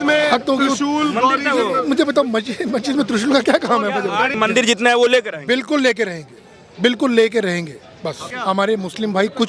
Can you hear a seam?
yes; 2 cuts; at 4.3 s, 8.2 s

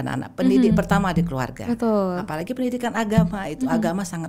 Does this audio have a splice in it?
no; 0 cuts

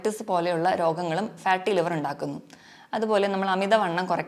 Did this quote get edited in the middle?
no; 0 cuts

